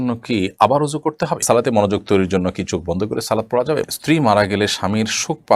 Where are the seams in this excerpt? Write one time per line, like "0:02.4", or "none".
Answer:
0:01.4
0:03.8